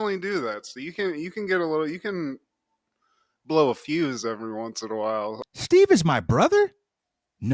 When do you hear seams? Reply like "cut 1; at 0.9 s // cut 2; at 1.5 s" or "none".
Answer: cut 1; at 5.3 s